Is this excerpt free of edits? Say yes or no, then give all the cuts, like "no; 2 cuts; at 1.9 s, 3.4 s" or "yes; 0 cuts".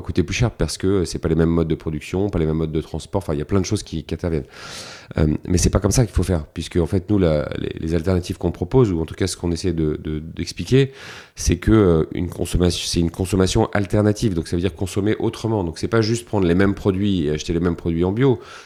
yes; 0 cuts